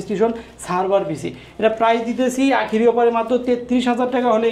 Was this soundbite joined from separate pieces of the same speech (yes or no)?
no